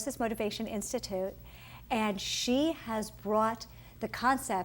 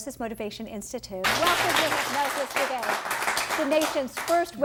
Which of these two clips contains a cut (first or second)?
first